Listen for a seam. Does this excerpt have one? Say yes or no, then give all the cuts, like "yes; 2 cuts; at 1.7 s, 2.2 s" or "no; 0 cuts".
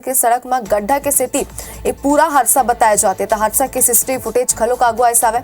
yes; 1 cut; at 2.5 s